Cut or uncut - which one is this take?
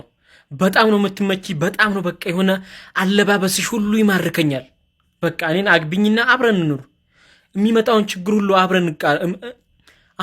uncut